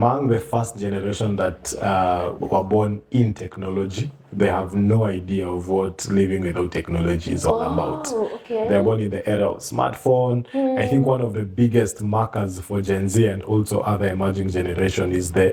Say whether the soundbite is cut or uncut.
uncut